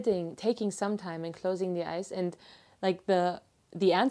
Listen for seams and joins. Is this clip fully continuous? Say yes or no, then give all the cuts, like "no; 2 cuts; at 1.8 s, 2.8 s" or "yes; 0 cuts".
yes; 0 cuts